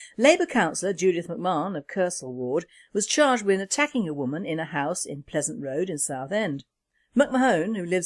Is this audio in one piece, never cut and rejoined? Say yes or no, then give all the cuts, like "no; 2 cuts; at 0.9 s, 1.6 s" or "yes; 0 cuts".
no; 1 cut; at 2.7 s